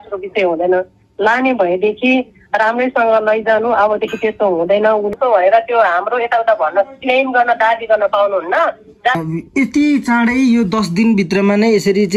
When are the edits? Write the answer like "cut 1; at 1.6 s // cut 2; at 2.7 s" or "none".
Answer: cut 1; at 5.1 s // cut 2; at 9.2 s